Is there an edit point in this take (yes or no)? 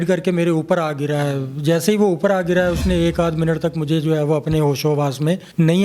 no